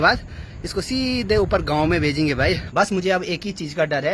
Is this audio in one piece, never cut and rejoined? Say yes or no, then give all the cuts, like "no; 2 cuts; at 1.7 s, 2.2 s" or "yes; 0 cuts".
no; 1 cut; at 2.7 s